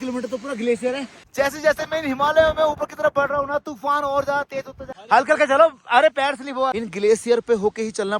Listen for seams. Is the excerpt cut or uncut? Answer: cut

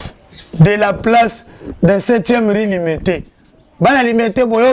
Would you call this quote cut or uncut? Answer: uncut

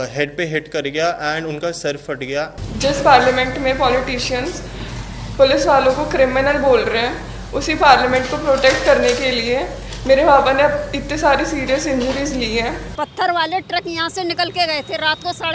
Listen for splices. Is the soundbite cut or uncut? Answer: cut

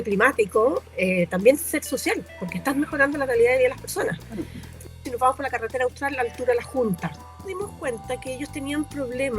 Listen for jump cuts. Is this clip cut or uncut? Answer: cut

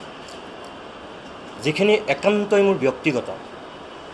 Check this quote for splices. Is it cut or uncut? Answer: uncut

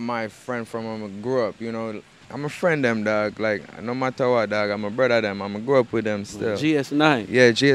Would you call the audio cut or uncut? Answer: cut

